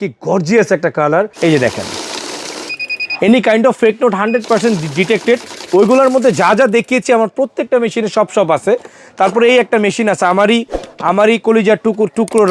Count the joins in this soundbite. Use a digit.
1